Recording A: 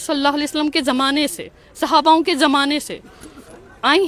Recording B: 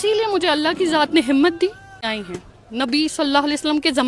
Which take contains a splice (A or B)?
B